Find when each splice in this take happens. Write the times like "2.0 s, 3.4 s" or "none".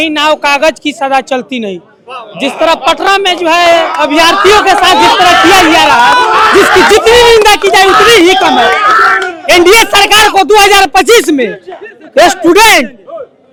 none